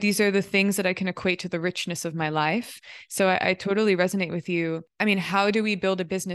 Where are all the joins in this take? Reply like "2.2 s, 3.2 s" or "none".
4.9 s